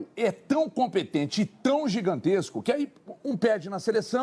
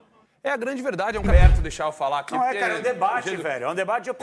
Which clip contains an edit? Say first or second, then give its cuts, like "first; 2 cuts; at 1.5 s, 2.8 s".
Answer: second; 1 cut; at 1.3 s